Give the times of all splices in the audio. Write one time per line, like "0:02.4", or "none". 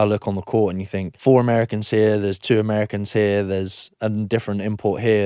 0:01.0

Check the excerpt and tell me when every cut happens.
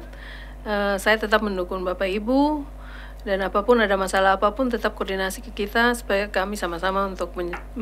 none

